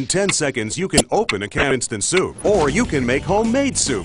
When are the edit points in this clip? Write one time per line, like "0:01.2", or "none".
0:01.7